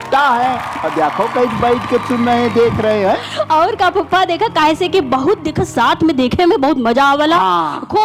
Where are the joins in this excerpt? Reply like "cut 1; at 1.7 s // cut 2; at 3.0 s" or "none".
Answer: none